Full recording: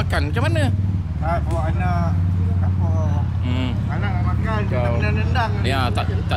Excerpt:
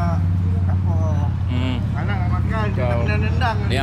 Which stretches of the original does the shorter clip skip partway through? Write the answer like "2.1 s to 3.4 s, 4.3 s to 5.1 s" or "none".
none

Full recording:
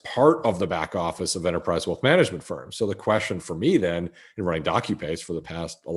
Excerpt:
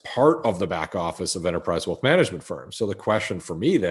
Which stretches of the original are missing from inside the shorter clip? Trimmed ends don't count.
none

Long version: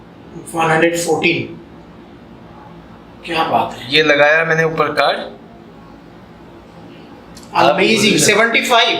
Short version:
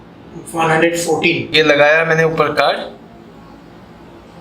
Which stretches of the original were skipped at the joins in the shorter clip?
1.4 s to 3.8 s

